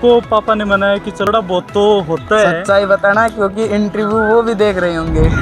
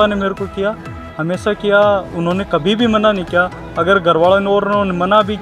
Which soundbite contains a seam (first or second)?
first